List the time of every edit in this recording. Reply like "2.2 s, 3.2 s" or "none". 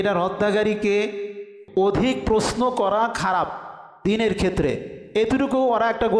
1.5 s